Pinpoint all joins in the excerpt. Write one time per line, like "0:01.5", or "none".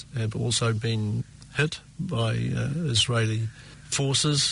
none